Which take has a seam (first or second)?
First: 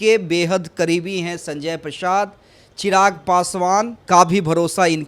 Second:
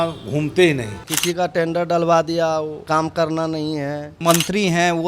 second